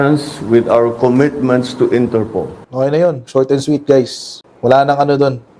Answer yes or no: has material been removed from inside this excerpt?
yes